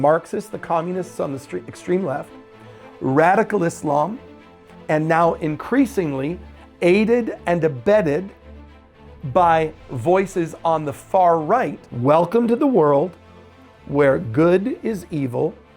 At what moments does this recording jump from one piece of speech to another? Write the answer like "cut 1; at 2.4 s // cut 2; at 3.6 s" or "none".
cut 1; at 11.8 s